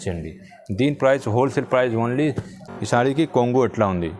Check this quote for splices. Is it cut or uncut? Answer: cut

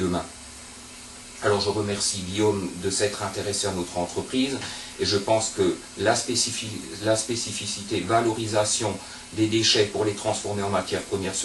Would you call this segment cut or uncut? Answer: uncut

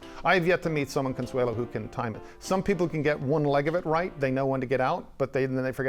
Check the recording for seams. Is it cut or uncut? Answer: uncut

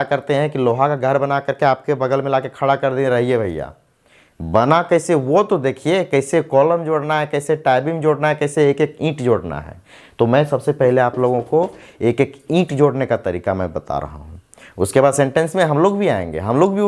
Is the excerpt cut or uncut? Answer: uncut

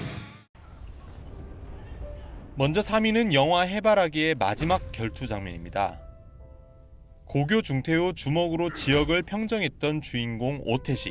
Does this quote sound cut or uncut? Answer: uncut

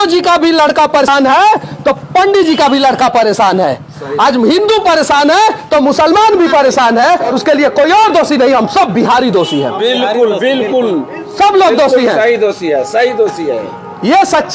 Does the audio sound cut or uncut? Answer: cut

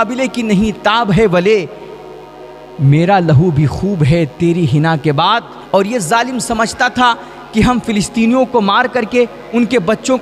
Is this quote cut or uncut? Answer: uncut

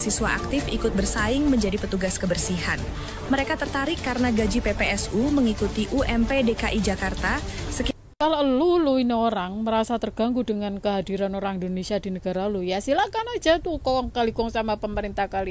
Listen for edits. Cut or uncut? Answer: cut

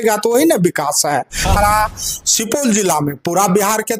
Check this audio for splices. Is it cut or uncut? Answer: cut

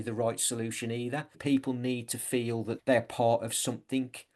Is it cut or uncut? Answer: cut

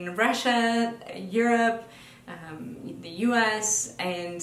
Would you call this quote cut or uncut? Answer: cut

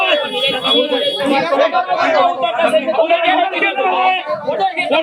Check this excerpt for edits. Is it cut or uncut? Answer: uncut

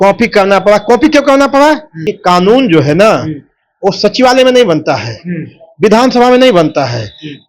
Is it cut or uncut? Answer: cut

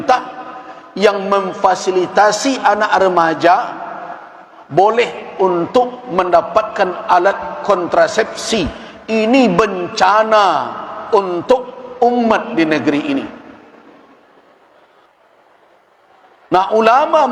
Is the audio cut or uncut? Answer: cut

